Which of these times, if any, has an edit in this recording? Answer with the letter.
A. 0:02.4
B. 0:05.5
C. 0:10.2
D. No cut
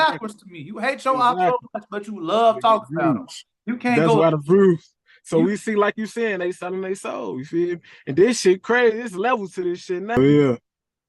C